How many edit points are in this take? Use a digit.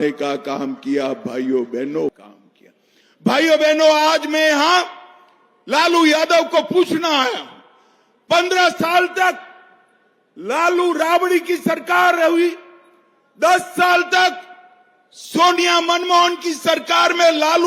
1